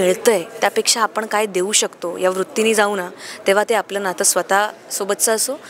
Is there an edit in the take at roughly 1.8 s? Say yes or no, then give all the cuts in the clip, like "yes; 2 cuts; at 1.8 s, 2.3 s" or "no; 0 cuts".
no; 0 cuts